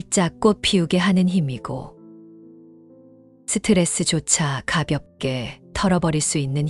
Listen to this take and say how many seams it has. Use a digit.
2